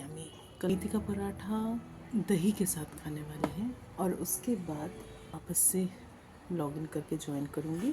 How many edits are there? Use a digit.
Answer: 4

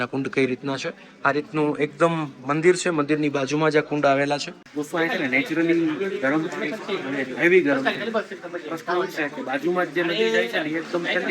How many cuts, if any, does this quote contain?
1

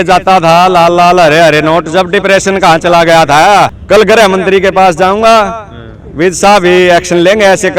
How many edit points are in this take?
1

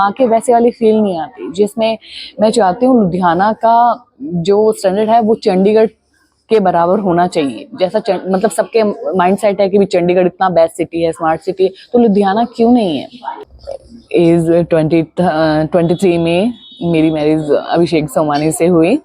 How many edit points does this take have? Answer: 1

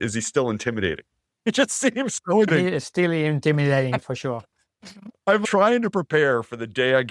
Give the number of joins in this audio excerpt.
2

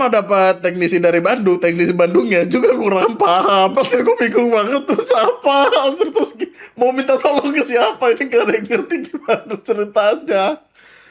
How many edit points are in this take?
0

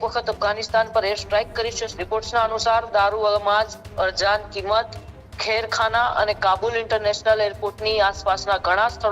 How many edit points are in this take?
1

